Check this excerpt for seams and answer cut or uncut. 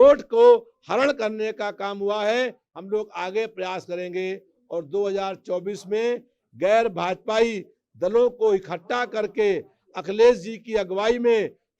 cut